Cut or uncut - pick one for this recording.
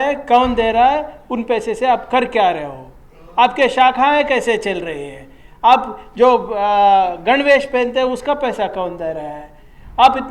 uncut